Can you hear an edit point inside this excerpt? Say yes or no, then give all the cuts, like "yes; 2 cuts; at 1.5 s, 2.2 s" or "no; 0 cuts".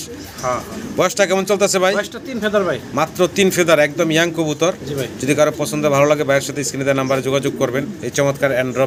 no; 0 cuts